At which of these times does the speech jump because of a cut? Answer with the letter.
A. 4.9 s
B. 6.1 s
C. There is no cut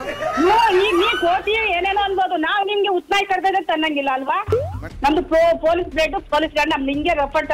A